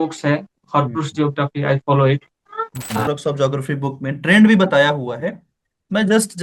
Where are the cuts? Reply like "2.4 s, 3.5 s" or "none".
3.0 s